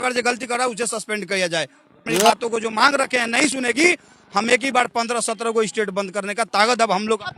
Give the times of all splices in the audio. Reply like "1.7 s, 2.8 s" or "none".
2.1 s